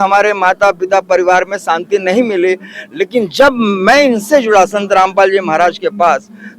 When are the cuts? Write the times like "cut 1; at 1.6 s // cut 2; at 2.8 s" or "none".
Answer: none

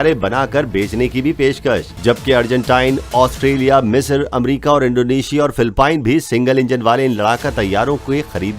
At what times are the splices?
cut 1; at 1.9 s

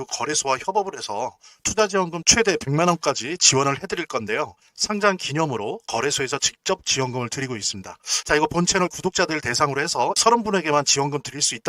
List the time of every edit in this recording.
none

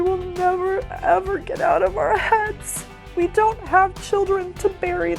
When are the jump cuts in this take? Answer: cut 1; at 3.1 s

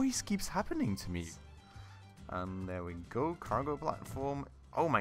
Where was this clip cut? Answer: cut 1; at 1.3 s

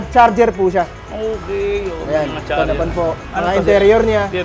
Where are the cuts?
cut 1; at 3.2 s

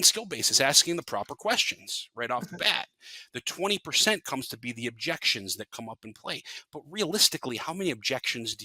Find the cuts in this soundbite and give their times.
none

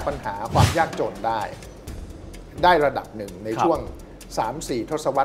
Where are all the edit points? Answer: none

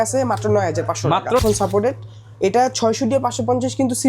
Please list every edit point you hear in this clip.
cut 1; at 1.4 s

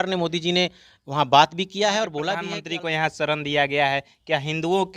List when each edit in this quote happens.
cut 1; at 2.4 s

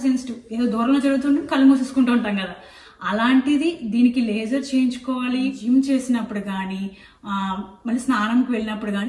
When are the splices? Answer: cut 1; at 5.6 s

